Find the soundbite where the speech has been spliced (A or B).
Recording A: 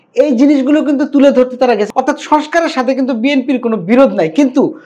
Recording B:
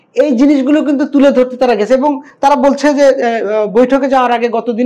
A